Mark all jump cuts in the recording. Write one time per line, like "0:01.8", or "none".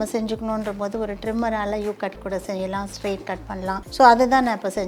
0:03.9